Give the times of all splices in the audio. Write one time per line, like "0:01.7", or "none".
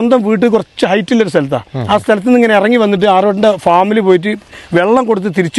none